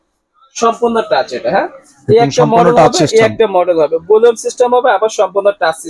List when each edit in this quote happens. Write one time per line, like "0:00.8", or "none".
none